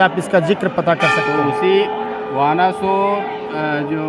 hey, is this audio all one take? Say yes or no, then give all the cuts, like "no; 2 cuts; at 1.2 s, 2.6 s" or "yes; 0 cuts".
yes; 0 cuts